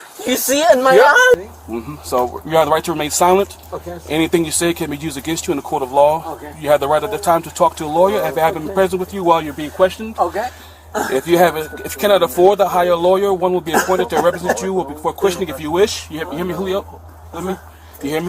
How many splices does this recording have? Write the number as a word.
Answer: one